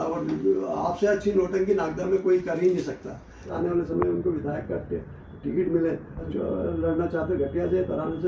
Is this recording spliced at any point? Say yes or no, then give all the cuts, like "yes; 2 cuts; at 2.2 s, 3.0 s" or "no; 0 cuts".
yes; 2 cuts; at 3.5 s, 6.2 s